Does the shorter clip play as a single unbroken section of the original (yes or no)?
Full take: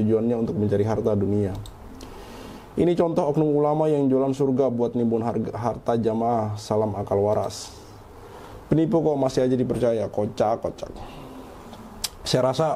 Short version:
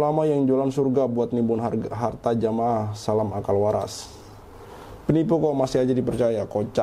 yes